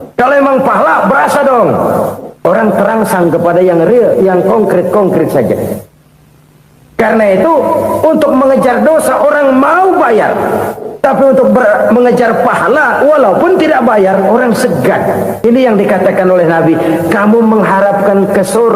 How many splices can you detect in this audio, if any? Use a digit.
1